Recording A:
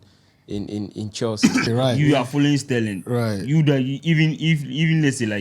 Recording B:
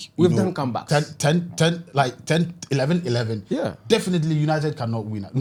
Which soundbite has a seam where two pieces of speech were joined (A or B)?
A